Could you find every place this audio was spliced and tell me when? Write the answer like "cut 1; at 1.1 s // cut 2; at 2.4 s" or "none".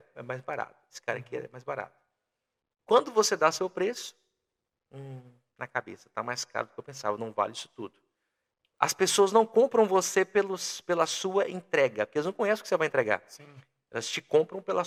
none